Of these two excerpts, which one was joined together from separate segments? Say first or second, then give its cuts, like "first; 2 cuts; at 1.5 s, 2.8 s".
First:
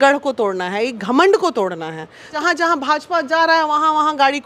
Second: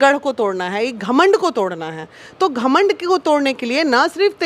first; 1 cut; at 2.3 s